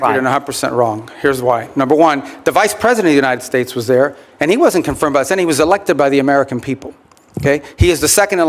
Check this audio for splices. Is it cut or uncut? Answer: uncut